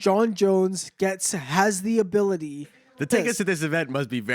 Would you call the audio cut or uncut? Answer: cut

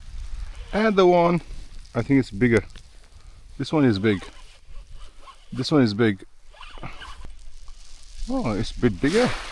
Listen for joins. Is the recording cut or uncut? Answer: cut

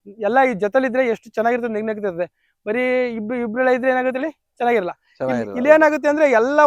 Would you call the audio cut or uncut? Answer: uncut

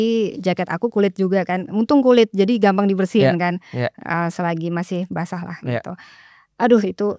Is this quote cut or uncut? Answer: uncut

